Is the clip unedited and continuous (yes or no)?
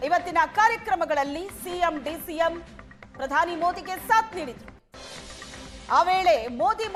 yes